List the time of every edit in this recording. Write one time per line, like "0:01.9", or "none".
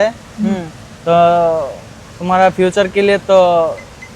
none